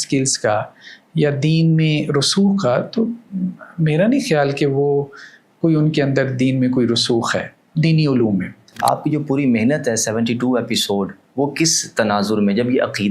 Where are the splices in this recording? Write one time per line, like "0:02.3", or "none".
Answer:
0:08.8